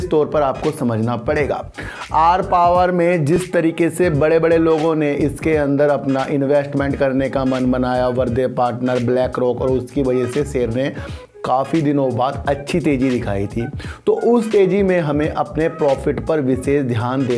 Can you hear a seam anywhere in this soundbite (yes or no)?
no